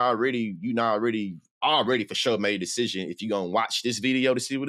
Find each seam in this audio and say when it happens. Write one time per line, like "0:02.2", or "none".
none